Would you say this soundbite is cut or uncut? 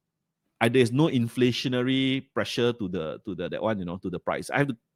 uncut